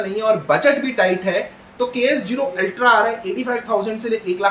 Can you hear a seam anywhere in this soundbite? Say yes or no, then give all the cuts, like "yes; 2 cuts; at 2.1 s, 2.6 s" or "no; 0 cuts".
no; 0 cuts